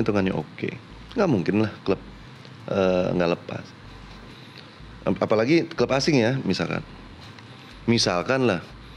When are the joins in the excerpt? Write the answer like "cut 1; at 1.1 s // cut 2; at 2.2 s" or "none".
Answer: none